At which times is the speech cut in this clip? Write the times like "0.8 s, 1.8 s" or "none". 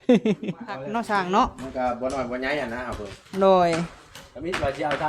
0.9 s